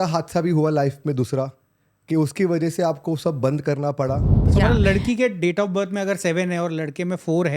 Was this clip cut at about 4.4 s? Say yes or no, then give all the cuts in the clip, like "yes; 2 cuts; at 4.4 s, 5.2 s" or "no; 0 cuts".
yes; 1 cut; at 4.4 s